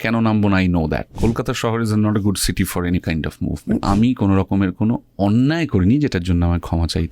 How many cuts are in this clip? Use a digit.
2